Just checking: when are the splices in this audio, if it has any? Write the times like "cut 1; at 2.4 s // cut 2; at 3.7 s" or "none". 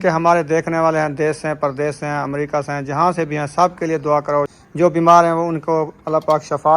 cut 1; at 4.6 s